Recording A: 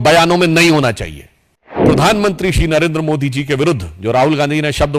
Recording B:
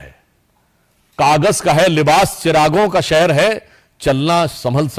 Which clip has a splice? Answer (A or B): A